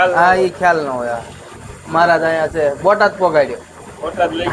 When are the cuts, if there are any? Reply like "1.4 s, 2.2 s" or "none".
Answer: 1.5 s